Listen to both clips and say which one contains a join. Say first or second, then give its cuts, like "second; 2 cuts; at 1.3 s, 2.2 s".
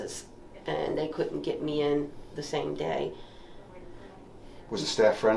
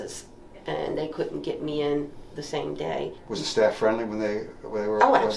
second; 1 cut; at 3.2 s